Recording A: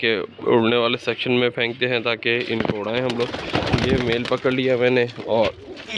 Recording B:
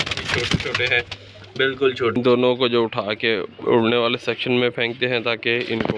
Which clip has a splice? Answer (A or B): B